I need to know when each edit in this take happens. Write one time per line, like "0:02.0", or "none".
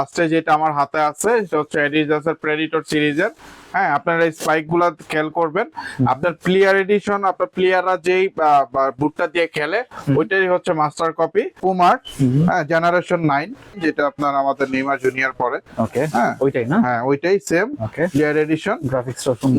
0:11.6
0:13.7

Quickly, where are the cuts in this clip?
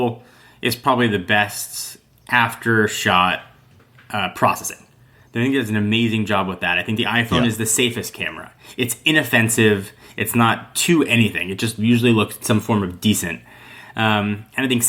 none

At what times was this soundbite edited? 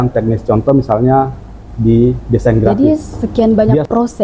0:02.7

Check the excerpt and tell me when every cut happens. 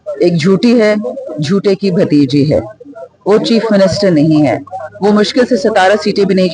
none

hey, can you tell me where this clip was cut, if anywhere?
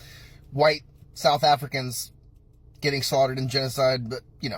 none

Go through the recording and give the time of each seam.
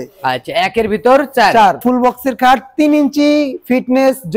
0:01.8

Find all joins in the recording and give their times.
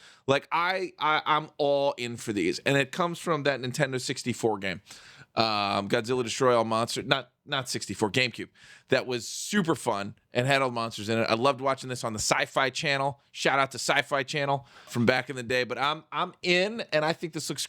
0:14.9

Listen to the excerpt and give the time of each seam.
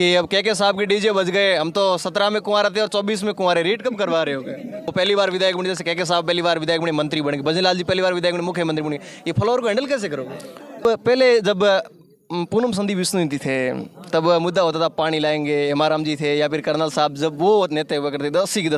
0:04.9
0:10.8

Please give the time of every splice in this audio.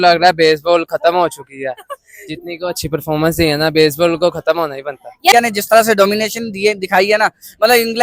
0:05.3

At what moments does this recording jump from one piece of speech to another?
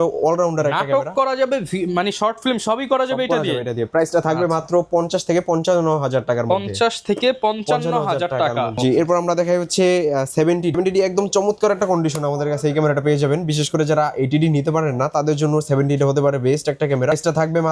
none

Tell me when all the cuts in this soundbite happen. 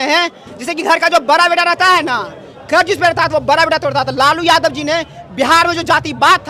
none

